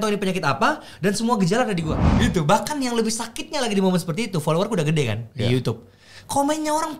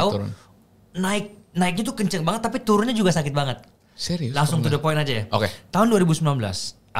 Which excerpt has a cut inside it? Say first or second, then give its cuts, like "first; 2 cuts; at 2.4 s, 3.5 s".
first; 1 cut; at 2.0 s